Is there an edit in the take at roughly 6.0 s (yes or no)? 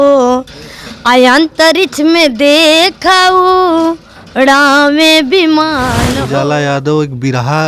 yes